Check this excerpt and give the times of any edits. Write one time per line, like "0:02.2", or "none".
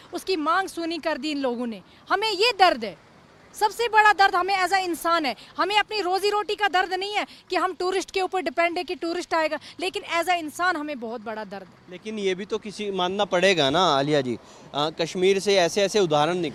none